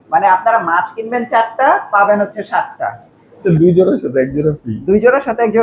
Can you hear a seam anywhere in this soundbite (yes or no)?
yes